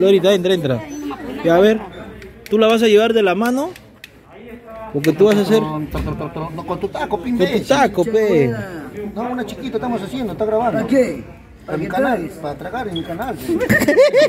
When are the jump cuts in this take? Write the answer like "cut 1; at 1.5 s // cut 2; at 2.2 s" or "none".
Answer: none